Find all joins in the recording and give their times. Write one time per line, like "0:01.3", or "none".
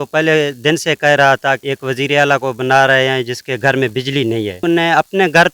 0:01.6
0:04.6